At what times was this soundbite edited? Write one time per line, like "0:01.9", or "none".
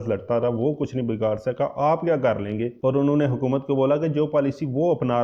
0:02.7